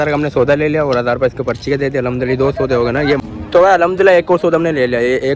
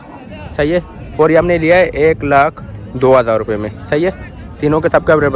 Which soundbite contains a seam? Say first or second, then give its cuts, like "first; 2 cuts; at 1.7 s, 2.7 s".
first; 1 cut; at 3.2 s